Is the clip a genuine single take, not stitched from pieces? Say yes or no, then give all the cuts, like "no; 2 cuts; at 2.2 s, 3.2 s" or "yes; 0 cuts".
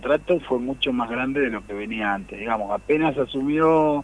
yes; 0 cuts